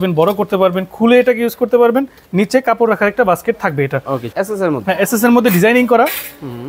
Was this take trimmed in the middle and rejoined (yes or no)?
yes